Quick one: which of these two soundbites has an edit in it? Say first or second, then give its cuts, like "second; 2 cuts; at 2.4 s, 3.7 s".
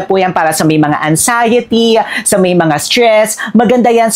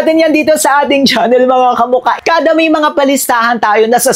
second; 1 cut; at 2.2 s